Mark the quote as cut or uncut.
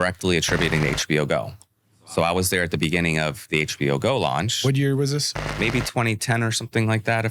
cut